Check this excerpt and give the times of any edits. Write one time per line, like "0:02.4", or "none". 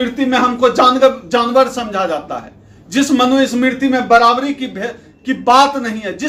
none